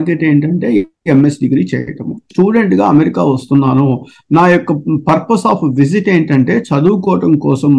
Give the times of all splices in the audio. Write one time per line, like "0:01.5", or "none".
0:02.3